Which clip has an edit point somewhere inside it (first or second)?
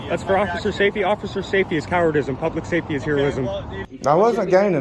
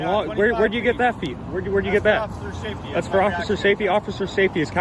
first